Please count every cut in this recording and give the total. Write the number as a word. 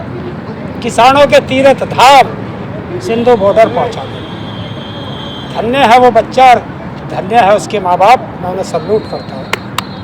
zero